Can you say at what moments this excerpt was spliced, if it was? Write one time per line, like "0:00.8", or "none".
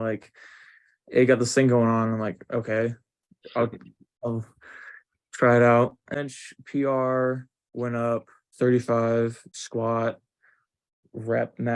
0:06.1
0:08.4
0:09.5